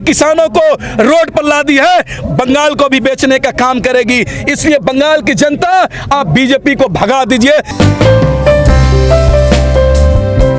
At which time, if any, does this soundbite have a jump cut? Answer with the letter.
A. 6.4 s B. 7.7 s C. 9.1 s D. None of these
B